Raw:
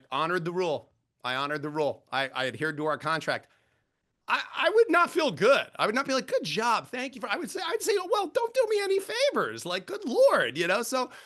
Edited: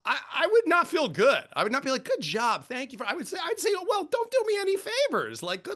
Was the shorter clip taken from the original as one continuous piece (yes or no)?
yes